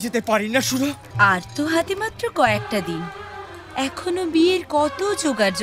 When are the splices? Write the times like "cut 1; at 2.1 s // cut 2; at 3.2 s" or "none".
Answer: cut 1; at 1.0 s